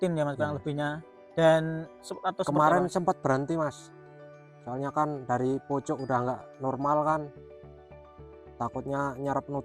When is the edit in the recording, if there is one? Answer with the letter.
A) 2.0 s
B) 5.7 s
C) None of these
A